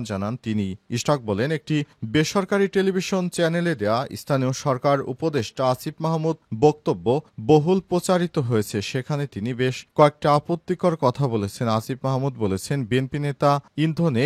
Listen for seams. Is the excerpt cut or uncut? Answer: uncut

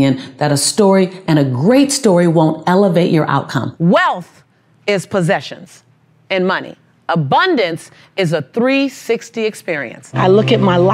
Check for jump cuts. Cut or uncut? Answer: cut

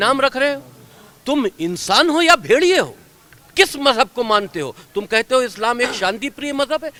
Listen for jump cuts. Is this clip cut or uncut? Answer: uncut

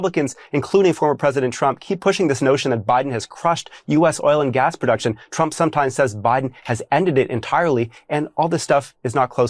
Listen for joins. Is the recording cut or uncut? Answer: uncut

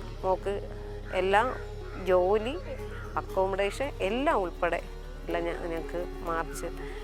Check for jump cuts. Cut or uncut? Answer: uncut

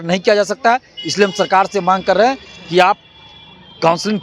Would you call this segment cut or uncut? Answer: uncut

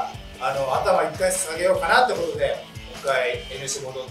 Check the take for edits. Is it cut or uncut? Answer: cut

